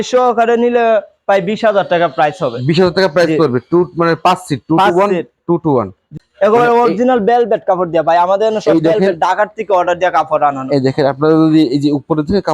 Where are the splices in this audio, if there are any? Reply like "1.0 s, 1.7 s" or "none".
6.1 s